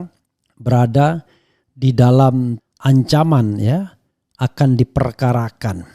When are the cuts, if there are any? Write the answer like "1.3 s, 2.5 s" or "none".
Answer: 2.6 s